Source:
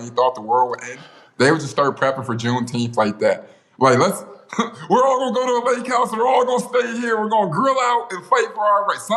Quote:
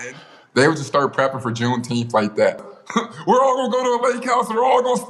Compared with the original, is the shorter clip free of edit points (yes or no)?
no